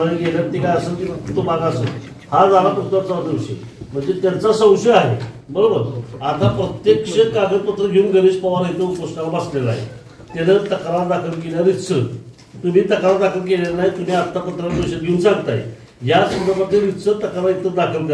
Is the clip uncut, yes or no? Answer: yes